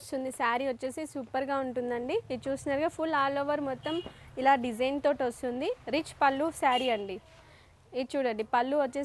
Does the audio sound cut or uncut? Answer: uncut